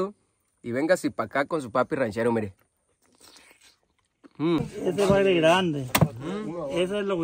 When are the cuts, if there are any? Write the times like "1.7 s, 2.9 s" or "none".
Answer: 4.7 s